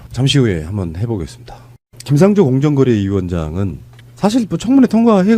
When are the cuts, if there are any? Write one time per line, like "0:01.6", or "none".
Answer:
0:02.6